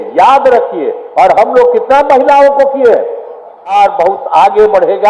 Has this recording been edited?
yes; 1 cut; at 3.7 s

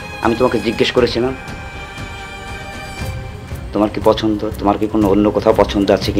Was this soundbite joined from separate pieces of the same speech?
no; 0 cuts

